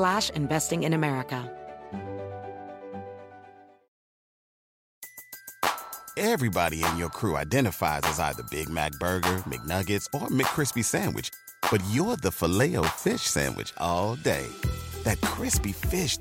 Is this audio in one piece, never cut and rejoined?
no; 1 cut; at 1.4 s

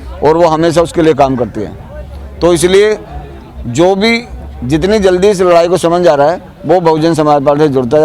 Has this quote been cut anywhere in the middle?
no; 0 cuts

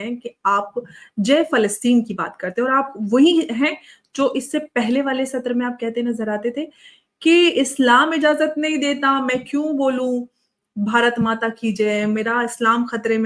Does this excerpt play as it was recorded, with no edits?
yes; 0 cuts

